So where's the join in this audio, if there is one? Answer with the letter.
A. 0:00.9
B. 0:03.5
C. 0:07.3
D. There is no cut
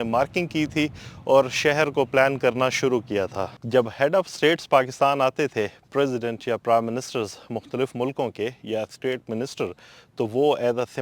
B